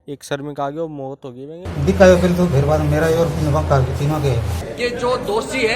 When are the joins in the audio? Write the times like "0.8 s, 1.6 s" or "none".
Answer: 1.6 s, 4.6 s